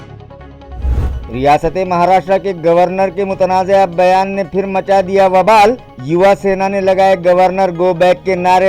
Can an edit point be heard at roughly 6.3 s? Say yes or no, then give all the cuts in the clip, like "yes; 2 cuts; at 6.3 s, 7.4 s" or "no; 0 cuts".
no; 1 cut; at 1.0 s